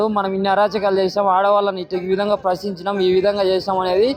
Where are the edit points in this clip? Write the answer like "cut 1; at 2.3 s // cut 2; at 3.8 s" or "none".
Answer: none